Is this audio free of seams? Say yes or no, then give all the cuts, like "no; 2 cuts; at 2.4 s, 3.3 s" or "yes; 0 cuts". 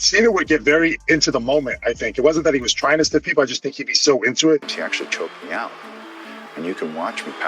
no; 1 cut; at 4.7 s